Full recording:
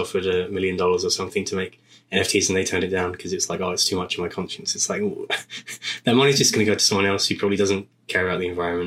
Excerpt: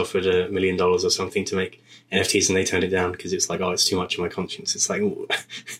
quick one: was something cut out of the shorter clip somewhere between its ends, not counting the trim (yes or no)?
no